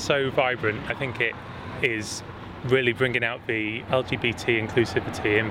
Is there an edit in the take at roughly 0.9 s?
yes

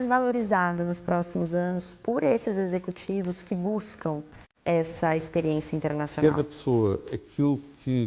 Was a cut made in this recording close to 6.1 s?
yes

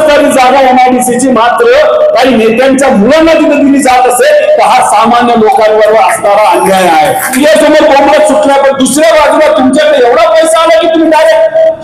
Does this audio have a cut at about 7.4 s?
yes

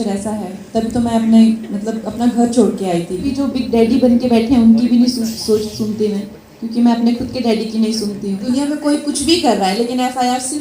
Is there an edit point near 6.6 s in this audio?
no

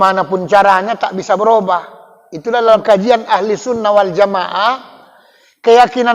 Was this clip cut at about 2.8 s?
yes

